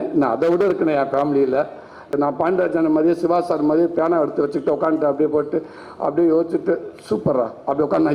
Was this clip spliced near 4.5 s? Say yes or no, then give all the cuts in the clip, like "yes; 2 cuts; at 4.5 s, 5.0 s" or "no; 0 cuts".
no; 1 cut; at 2.1 s